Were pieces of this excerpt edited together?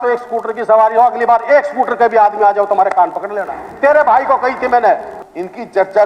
yes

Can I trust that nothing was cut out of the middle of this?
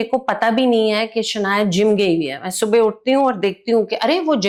yes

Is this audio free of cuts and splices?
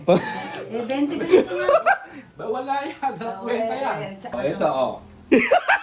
no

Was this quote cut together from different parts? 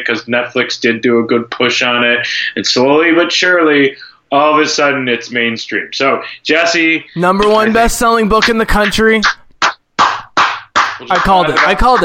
no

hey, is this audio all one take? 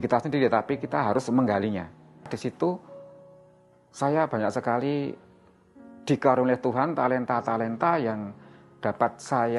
no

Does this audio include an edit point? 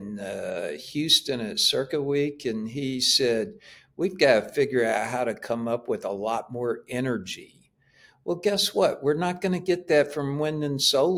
no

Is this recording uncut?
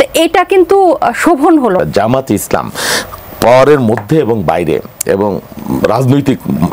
no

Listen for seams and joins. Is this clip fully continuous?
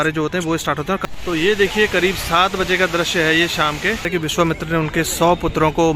no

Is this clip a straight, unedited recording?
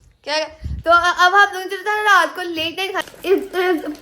no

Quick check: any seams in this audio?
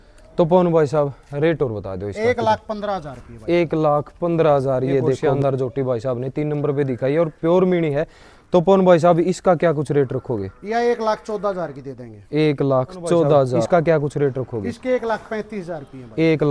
yes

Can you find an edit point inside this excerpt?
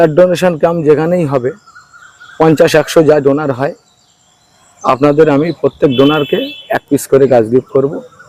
no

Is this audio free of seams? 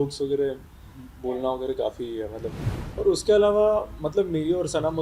no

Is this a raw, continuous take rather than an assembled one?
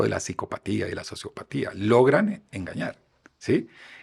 yes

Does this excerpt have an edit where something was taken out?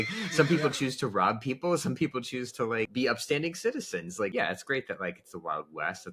yes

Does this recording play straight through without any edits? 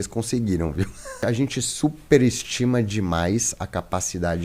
no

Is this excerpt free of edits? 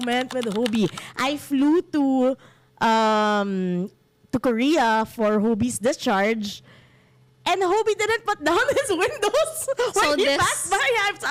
yes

